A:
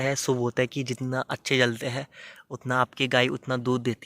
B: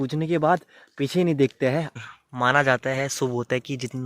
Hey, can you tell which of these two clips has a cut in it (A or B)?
B